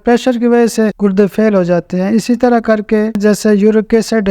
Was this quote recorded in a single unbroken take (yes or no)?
no